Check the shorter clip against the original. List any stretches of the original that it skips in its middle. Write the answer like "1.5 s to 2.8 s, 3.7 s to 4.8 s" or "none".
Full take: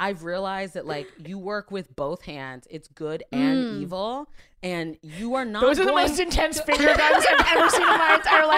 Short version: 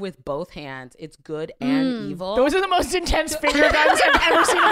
4.1 s to 5.6 s